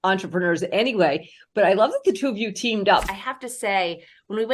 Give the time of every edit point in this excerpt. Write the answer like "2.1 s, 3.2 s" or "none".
3.1 s